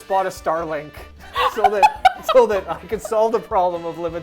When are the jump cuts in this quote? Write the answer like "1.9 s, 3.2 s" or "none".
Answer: none